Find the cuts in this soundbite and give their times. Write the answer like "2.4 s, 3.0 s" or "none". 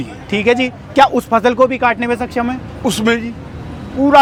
none